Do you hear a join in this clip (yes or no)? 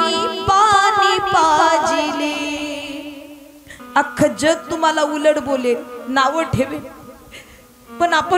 yes